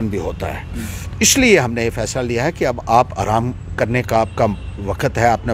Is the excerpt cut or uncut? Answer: uncut